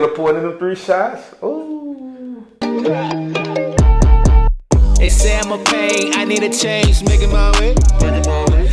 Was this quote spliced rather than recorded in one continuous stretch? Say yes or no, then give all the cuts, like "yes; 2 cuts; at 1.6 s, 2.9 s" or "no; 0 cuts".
yes; 1 cut; at 2.6 s